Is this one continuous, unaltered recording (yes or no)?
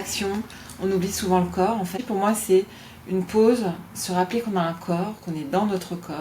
no